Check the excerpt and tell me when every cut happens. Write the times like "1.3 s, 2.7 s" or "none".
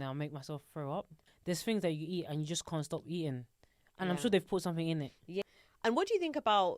1.2 s, 5.4 s